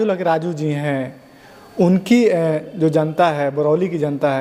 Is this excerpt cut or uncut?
uncut